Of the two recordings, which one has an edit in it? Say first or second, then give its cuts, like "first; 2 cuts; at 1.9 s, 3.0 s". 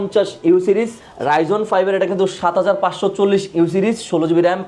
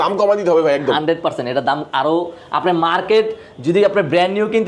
first; 1 cut; at 1.0 s